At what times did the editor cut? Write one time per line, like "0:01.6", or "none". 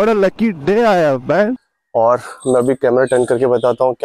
0:01.7